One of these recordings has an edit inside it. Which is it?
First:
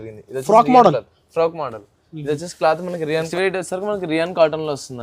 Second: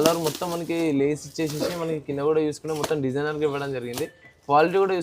first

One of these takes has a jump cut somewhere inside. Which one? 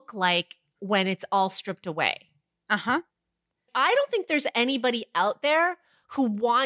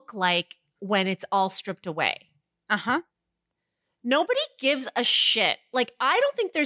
first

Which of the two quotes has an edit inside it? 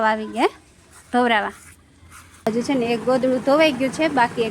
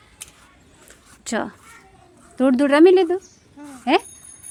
first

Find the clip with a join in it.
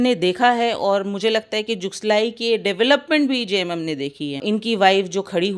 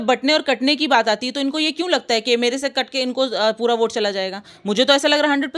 first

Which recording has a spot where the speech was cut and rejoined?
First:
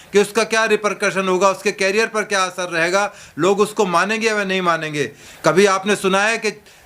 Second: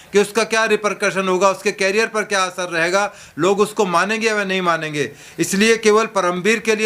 first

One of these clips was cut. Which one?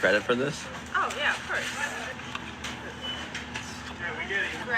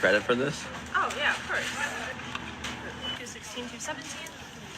second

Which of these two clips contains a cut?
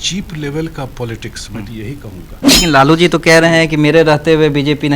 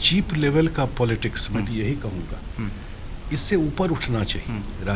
first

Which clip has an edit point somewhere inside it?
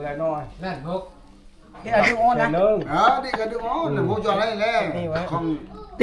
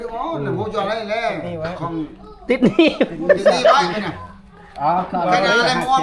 first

